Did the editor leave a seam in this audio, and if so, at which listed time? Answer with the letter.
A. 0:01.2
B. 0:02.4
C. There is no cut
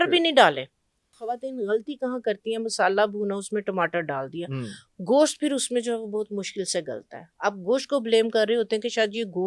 A